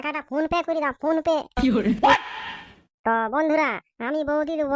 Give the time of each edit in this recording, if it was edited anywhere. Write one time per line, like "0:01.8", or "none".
0:02.1